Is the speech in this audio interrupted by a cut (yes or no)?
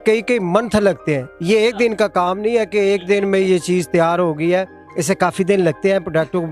no